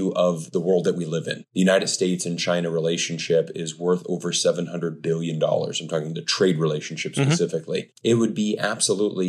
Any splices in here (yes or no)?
yes